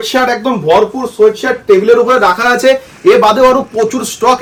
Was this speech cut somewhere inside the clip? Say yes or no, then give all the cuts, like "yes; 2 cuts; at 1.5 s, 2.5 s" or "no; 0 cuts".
no; 0 cuts